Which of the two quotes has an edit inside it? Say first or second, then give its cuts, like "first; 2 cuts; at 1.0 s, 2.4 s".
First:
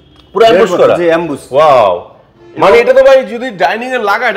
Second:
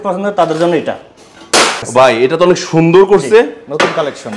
second; 1 cut; at 1.8 s